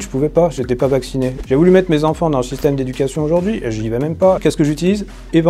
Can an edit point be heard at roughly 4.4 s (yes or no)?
yes